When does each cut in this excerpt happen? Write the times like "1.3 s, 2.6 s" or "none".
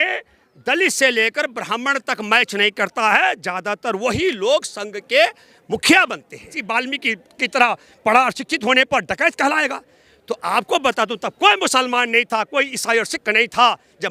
6.6 s